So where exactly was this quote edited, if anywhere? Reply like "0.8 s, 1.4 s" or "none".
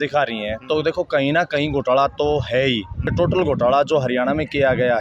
3.1 s